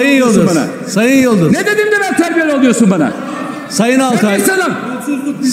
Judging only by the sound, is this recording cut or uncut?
uncut